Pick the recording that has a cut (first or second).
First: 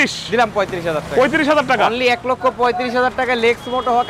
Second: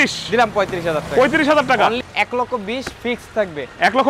second